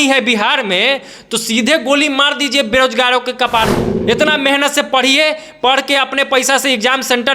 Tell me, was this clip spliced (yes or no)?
yes